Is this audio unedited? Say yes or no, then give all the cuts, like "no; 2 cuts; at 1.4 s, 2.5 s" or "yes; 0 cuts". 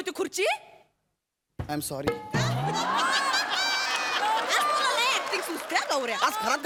yes; 0 cuts